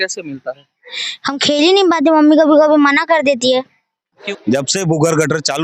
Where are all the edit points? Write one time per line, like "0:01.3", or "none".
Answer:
0:04.2